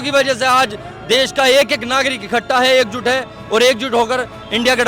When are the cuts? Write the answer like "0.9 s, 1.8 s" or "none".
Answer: none